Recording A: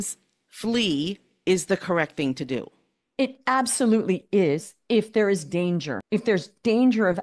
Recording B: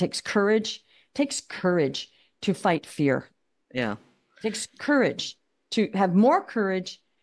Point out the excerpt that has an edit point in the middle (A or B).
A